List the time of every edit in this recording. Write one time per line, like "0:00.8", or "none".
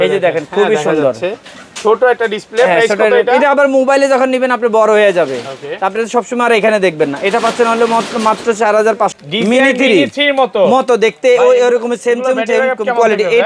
0:09.2

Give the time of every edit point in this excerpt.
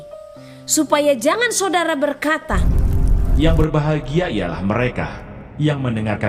0:02.6

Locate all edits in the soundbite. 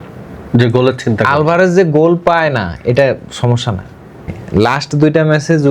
0:04.4

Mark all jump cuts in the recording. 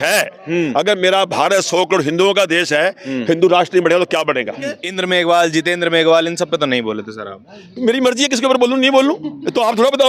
0:04.9

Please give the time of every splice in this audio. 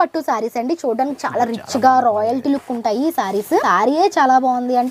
0:03.6

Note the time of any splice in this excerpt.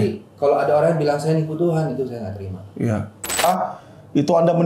0:03.4

